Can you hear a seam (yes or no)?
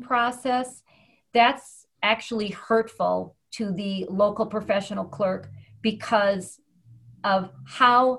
no